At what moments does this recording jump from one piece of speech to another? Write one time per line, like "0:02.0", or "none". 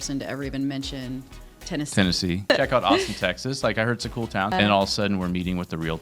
0:02.5
0:04.5